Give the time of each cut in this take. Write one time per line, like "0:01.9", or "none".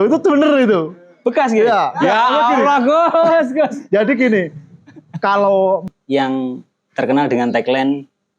0:05.8